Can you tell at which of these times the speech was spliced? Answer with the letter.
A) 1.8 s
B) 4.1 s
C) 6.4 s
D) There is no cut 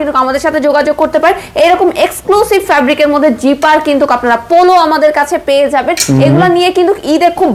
D